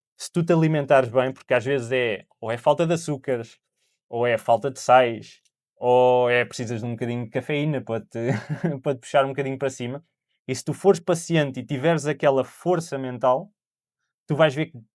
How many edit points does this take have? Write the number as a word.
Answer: zero